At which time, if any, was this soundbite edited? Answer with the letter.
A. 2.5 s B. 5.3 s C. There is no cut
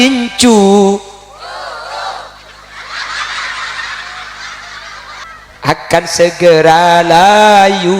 B